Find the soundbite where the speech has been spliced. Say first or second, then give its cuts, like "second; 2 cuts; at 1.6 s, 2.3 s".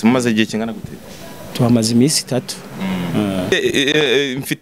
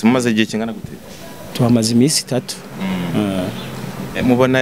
first; 1 cut; at 3.5 s